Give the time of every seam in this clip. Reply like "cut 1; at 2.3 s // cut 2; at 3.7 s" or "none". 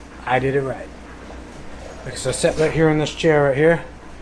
none